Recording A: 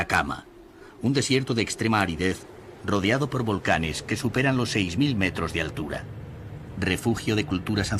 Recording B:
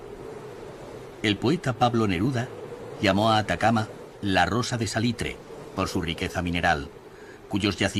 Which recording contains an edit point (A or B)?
A